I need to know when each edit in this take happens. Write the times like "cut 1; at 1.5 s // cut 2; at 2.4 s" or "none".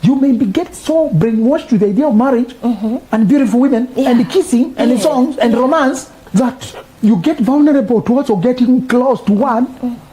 cut 1; at 3.0 s // cut 2; at 6.1 s

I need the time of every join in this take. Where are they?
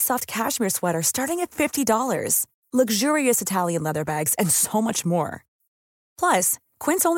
none

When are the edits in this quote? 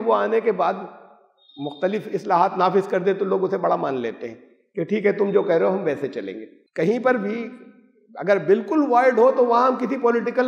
cut 1; at 6.6 s

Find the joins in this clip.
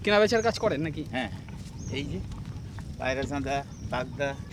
none

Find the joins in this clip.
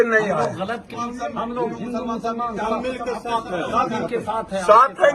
cut 1; at 0.9 s

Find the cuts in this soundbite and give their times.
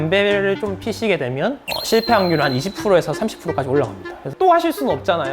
cut 1; at 4.3 s

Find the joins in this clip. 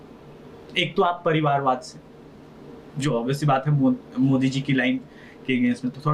none

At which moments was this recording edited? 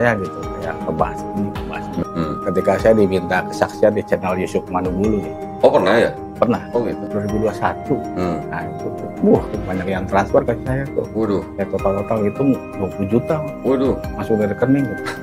cut 1; at 2.0 s

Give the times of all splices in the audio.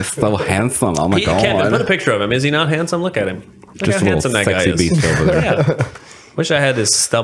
none

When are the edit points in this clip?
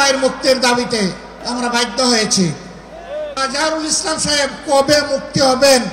cut 1; at 1.3 s // cut 2; at 3.4 s

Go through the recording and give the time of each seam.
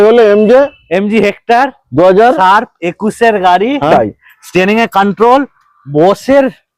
cut 1; at 3.9 s

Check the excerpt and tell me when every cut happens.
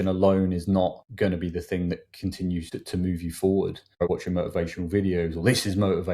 cut 1; at 1.0 s // cut 2; at 2.7 s // cut 3; at 4.0 s

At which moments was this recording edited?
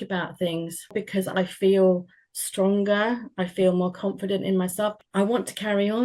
cut 1; at 1.0 s // cut 2; at 4.9 s

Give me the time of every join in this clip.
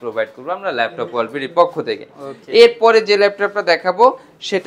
none

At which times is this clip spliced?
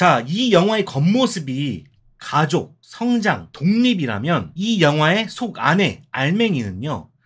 cut 1; at 2.8 s // cut 2; at 3.5 s // cut 3; at 4.5 s

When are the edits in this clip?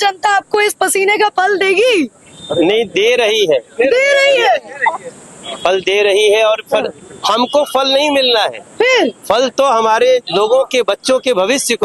none

